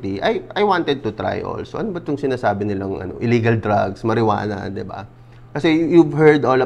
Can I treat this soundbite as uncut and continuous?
yes; 0 cuts

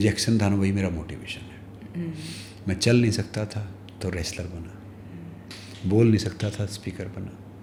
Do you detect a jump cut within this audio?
no; 0 cuts

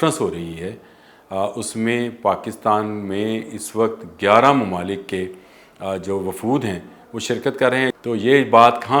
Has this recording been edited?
yes; 1 cut; at 8.0 s

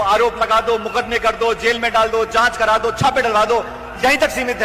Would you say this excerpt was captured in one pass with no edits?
yes; 0 cuts

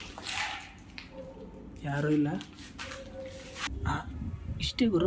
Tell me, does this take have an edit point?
yes; 1 cut; at 3.7 s

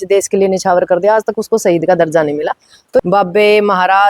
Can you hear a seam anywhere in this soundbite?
yes; 1 cut; at 3.0 s

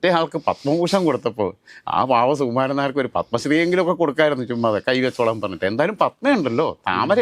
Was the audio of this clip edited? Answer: no; 0 cuts

